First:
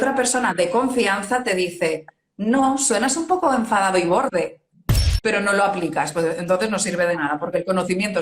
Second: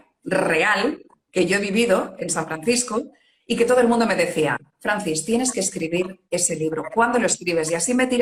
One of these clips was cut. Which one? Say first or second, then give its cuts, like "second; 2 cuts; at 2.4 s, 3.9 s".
first; 1 cut; at 5.0 s